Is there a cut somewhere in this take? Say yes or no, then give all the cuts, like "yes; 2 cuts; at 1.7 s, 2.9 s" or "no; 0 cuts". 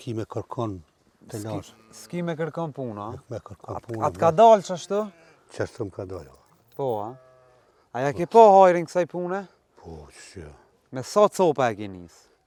no; 0 cuts